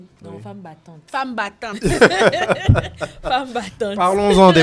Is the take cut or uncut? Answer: uncut